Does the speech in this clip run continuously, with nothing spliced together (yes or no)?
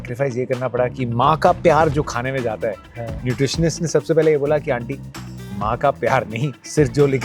yes